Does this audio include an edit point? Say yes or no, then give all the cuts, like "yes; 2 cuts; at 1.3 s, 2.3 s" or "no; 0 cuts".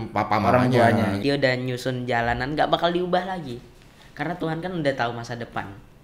yes; 1 cut; at 1.2 s